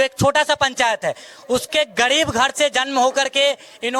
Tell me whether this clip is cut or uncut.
uncut